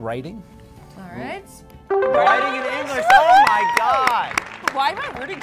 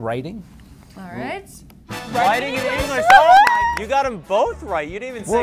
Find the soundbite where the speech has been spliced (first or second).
second